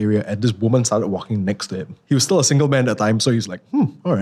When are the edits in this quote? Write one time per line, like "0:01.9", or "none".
0:01.9